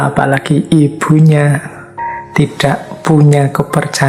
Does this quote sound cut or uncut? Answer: cut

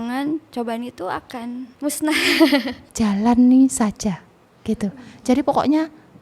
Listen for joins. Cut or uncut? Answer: cut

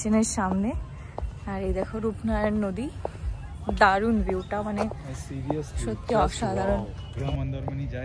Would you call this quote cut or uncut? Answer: uncut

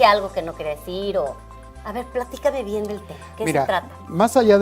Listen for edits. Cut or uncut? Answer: cut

